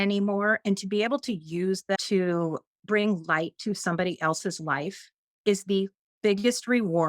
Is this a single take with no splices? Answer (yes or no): no